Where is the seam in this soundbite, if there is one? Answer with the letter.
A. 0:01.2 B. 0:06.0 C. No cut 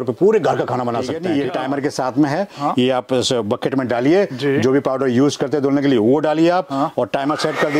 A